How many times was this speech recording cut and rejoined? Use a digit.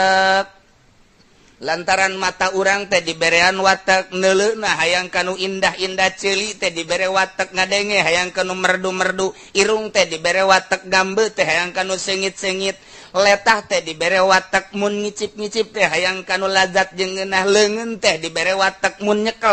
0